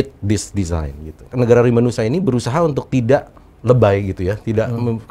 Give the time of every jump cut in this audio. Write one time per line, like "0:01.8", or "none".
0:01.3